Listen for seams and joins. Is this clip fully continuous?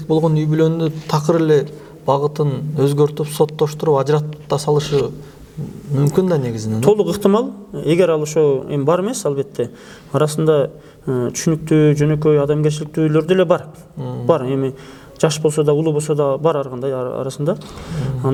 yes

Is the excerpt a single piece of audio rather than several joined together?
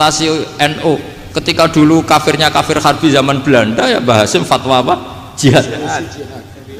yes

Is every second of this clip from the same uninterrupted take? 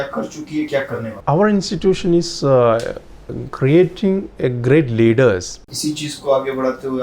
no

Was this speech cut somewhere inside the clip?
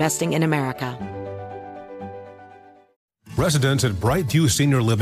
yes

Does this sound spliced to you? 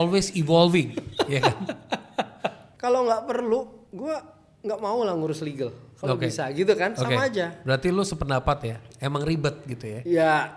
yes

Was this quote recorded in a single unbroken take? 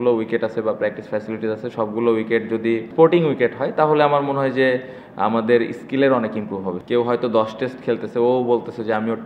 no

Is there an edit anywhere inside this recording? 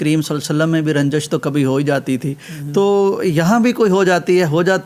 no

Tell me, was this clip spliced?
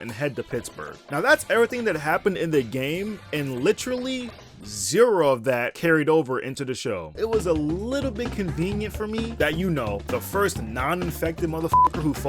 yes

